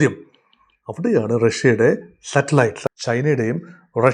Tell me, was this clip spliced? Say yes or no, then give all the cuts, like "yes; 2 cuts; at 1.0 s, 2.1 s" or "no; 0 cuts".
yes; 1 cut; at 2.8 s